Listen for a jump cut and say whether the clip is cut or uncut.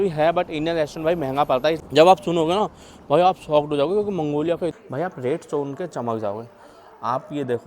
cut